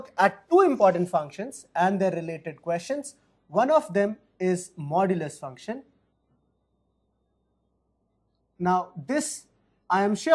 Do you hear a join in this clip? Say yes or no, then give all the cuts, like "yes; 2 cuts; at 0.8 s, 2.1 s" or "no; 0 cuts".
no; 0 cuts